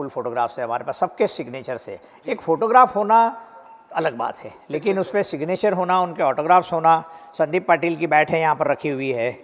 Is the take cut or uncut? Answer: uncut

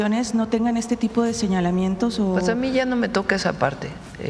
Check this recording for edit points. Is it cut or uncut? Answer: uncut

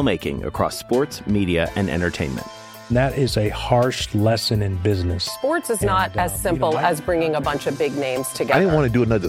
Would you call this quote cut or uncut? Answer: uncut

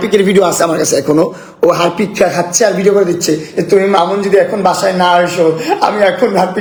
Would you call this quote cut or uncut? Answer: uncut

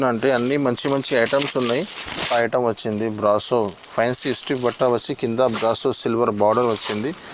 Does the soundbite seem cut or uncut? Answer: cut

